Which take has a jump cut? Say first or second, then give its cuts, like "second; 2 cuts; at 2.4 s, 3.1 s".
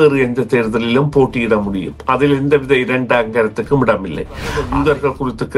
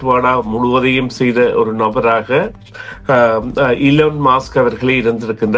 first; 1 cut; at 4.6 s